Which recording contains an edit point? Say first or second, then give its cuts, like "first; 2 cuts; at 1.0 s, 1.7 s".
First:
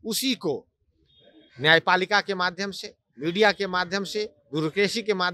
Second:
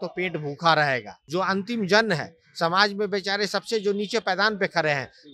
second; 1 cut; at 1.1 s